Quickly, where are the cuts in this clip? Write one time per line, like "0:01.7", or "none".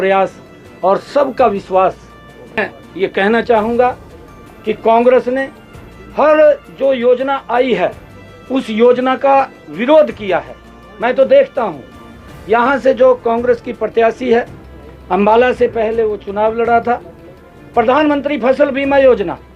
0:02.6